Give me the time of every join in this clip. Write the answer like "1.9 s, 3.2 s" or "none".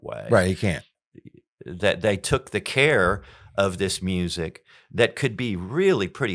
1.0 s